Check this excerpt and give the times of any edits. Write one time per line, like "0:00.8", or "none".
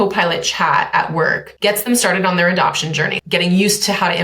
0:01.5
0:03.2